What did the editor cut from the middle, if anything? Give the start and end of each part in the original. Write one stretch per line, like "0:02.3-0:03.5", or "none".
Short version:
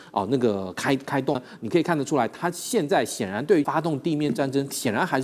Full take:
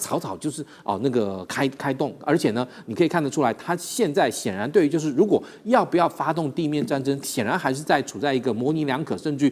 0:02.2-0:02.7
0:04.9-0:06.2